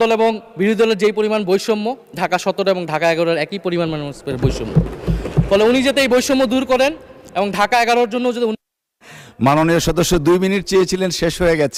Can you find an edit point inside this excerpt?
no; 0 cuts

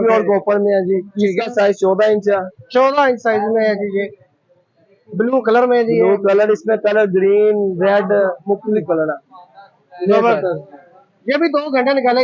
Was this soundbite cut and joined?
no; 0 cuts

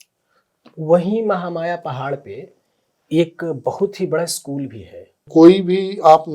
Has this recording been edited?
yes; 1 cut; at 5.3 s

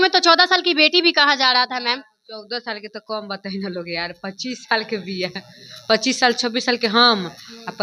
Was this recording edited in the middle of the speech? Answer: no; 0 cuts

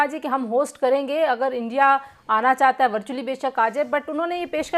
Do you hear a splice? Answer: no; 0 cuts

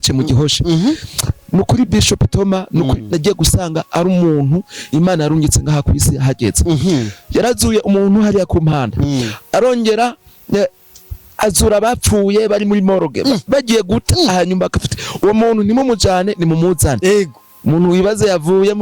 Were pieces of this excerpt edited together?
no; 0 cuts

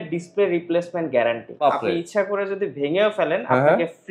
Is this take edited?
yes; 1 cut; at 1.6 s

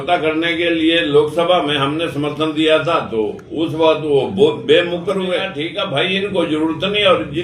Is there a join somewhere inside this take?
yes; 1 cut; at 5.6 s

